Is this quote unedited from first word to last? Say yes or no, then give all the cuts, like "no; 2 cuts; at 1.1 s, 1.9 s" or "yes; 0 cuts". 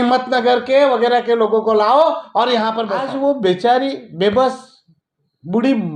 no; 1 cut; at 2.9 s